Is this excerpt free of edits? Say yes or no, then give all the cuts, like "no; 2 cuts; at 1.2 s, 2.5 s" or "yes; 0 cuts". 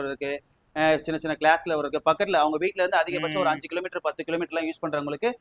yes; 0 cuts